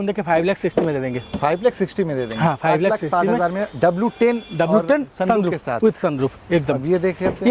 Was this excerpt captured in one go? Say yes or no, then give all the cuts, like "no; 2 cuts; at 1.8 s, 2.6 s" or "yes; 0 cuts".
yes; 0 cuts